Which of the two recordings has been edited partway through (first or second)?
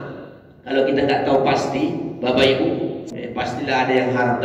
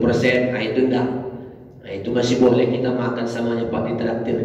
first